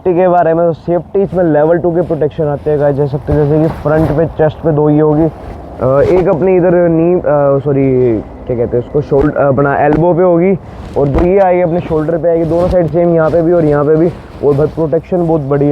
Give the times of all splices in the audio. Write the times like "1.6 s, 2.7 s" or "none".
none